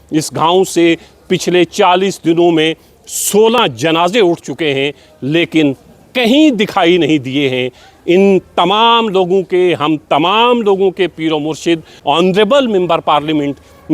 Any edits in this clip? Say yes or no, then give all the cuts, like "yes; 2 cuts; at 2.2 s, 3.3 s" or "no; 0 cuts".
yes; 1 cut; at 12.0 s